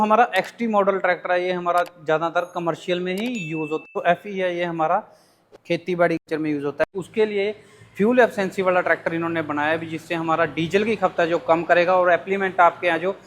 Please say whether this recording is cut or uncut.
cut